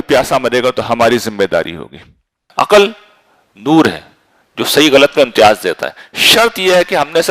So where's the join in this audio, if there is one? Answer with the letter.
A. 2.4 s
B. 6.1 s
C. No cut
A